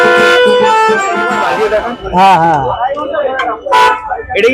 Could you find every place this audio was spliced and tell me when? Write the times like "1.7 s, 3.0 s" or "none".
1.4 s